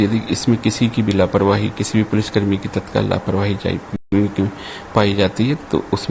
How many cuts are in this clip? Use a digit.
0